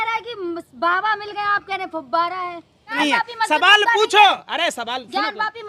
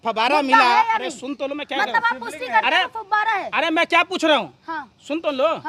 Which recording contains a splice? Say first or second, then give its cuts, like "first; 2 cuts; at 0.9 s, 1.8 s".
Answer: first; 1 cut; at 2.9 s